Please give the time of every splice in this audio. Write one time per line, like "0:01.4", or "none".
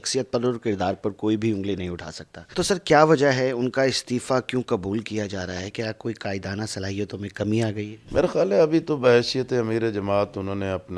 none